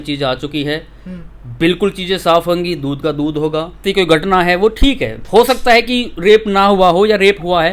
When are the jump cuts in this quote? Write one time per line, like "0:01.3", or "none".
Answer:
0:03.8

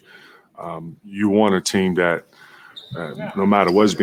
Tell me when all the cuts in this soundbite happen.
none

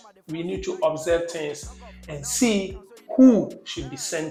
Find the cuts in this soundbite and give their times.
none

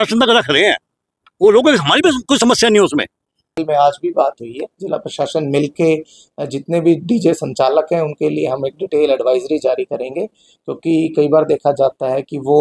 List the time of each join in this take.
0:03.5

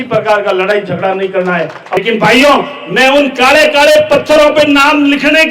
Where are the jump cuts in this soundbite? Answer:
0:02.0

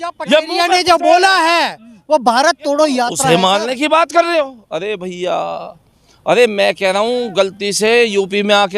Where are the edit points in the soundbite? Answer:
0:03.2

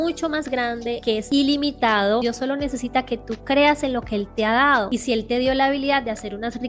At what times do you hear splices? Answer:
0:01.1
0:02.2
0:04.9

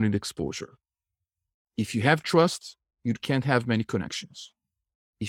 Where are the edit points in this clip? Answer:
none

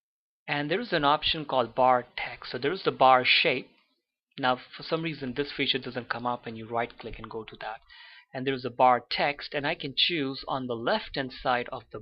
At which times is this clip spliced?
0:07.1

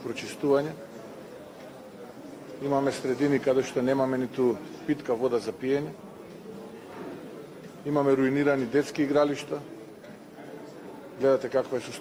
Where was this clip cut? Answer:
none

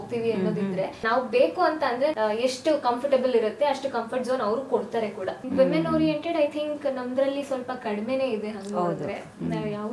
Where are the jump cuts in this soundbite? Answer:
0:01.0
0:02.1
0:05.4

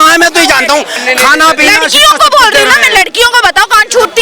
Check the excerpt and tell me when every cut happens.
0:01.0

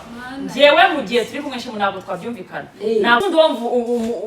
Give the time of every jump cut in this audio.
0:03.2

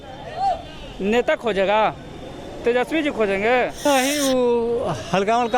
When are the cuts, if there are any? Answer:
0:03.8

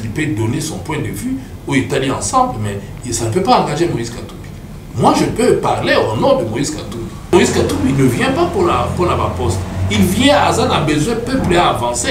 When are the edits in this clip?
0:07.3

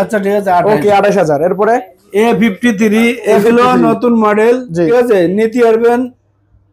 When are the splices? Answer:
0:02.0
0:04.9

